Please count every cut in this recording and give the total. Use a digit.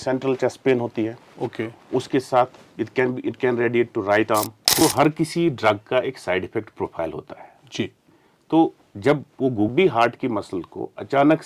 2